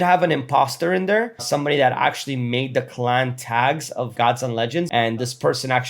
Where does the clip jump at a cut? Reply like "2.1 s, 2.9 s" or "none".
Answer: 4.9 s